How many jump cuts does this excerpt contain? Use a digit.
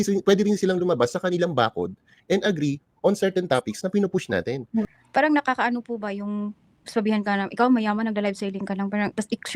1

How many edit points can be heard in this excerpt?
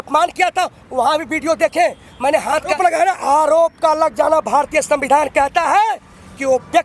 1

